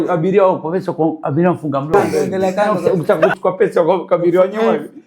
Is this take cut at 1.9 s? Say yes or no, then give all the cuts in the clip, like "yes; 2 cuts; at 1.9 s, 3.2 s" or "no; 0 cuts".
yes; 1 cut; at 1.9 s